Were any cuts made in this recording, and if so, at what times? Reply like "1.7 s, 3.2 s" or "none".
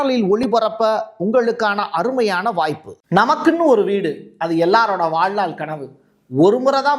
2.9 s